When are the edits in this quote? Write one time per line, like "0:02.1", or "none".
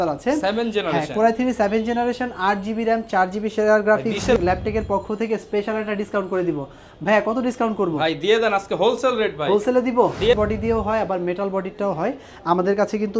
0:04.4
0:10.3